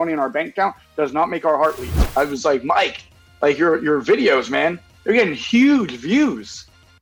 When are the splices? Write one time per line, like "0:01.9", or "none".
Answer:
0:02.0